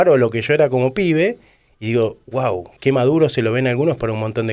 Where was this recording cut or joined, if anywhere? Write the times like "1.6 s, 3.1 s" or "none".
2.7 s